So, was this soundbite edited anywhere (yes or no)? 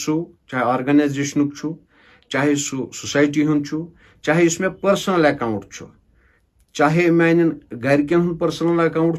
no